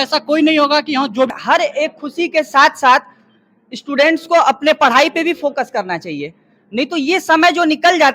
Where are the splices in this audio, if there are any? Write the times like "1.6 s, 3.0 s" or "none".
1.4 s